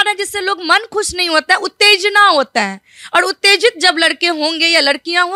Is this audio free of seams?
yes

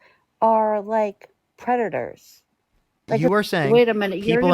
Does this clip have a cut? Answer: yes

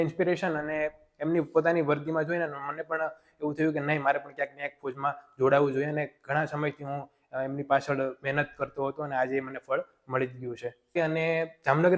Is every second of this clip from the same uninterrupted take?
no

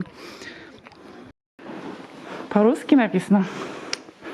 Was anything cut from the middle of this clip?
yes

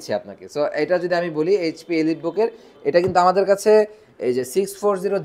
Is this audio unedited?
yes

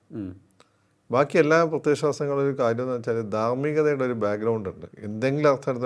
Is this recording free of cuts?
yes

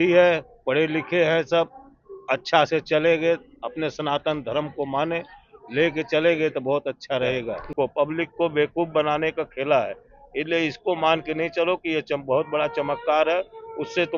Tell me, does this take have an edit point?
yes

